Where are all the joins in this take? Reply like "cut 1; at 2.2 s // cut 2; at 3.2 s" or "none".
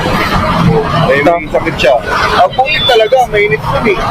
none